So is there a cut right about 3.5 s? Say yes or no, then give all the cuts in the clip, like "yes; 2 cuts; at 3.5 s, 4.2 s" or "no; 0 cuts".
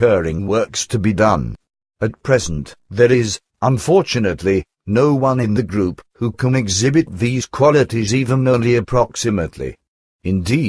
no; 1 cut; at 2.0 s